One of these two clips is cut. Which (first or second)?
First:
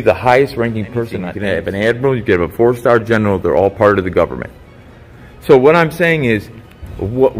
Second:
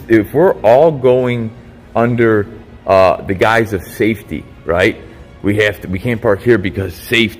first